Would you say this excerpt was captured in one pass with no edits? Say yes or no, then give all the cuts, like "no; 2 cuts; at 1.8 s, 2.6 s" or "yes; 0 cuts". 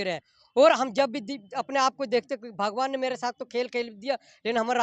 yes; 0 cuts